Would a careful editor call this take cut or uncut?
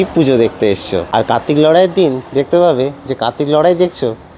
uncut